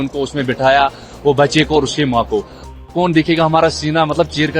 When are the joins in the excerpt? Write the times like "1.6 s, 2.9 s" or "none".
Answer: 2.7 s